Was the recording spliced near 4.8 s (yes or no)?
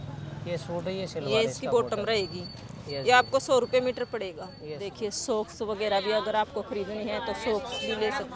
yes